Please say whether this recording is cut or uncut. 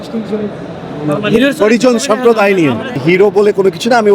cut